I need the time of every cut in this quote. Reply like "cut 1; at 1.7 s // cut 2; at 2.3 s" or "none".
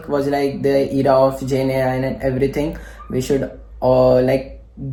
none